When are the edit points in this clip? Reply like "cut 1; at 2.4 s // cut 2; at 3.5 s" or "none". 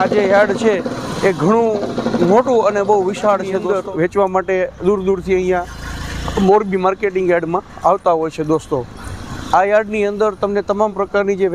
cut 1; at 3.6 s